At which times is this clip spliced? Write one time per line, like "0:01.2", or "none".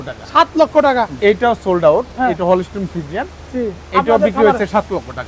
0:01.1